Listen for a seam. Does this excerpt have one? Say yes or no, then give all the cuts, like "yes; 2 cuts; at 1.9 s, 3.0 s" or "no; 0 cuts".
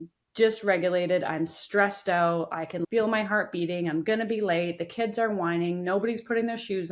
no; 0 cuts